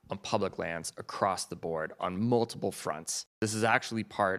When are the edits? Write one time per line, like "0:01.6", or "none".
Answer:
0:03.4